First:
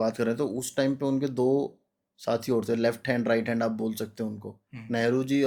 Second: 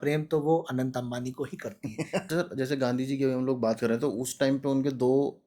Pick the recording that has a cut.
second; 1 cut; at 2.2 s

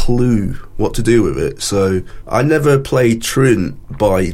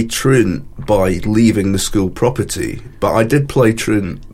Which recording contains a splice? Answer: first; 1 cut; at 2.1 s

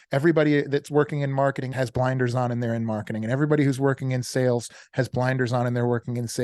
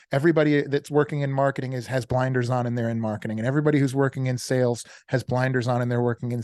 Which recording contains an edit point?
first; 1 cut; at 1.7 s

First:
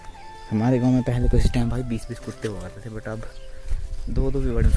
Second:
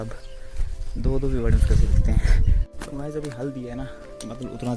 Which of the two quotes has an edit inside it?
second; 1 cut; at 2.7 s

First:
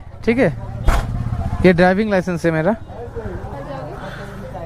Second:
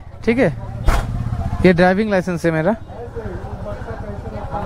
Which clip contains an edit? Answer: first; 1 cut; at 3.5 s

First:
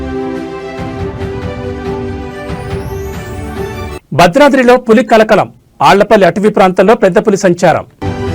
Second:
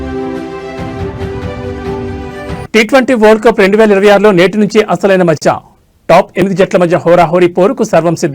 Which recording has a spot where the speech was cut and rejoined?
first; 2 cuts; at 2.6 s, 3.5 s

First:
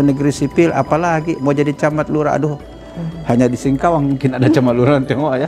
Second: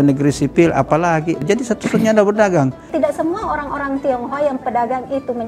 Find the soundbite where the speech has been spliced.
second; 2 cuts; at 1.4 s, 2.9 s

